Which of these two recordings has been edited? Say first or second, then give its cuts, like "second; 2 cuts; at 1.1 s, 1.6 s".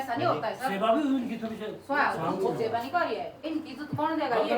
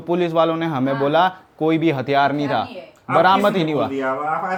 first; 1 cut; at 3.4 s